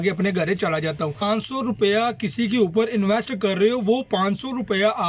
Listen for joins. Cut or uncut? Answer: cut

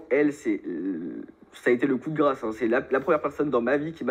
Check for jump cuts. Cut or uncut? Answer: uncut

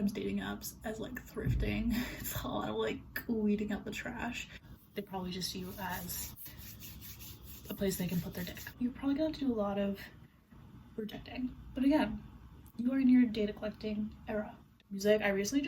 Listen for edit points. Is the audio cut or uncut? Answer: cut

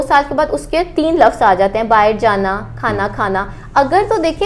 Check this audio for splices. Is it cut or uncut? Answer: uncut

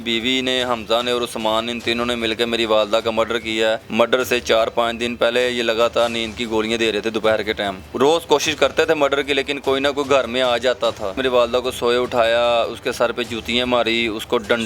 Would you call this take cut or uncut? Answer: cut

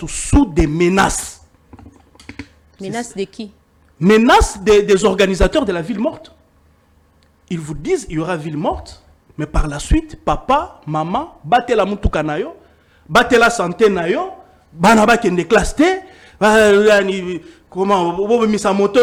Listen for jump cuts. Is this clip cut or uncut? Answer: uncut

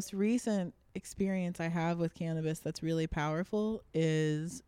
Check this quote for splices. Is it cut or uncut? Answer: uncut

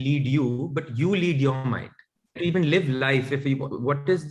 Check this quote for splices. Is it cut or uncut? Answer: cut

